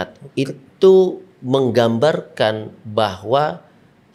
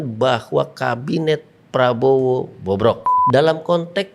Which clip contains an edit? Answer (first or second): second